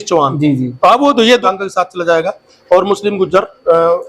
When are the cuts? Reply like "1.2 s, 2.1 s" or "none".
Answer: 1.4 s

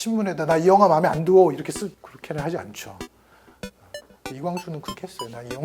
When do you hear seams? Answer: 2.1 s

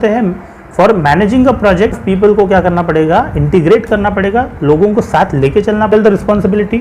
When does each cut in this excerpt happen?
2.0 s, 5.9 s

